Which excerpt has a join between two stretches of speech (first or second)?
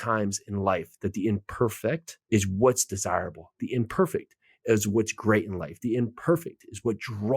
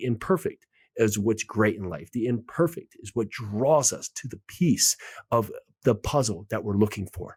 first